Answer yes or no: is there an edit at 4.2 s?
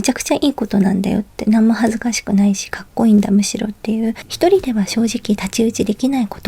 yes